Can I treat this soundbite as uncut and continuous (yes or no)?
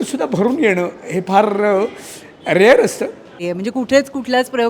no